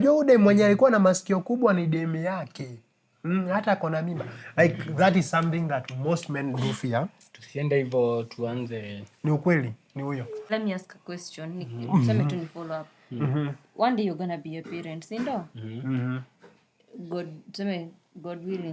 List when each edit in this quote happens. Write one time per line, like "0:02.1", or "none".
0:10.4